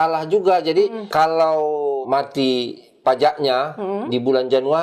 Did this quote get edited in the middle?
yes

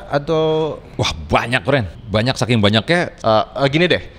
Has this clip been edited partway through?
yes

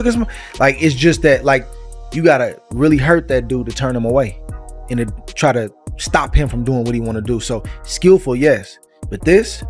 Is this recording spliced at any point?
no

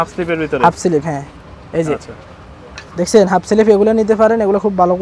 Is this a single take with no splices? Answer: yes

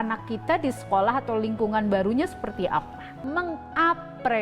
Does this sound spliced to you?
yes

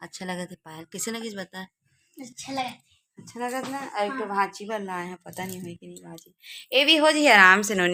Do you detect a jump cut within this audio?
no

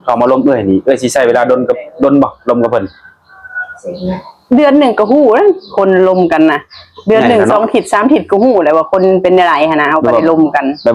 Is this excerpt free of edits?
yes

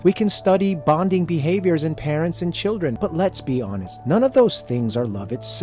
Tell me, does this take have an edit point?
yes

